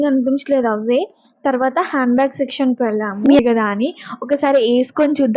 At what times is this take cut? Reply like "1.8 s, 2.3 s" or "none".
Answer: 3.4 s